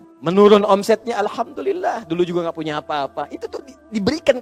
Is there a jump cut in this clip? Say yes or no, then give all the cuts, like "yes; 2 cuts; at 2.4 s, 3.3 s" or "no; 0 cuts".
no; 0 cuts